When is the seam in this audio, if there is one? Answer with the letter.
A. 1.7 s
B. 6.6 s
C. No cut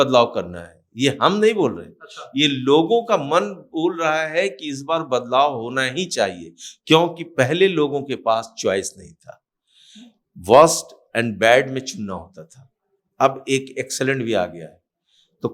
C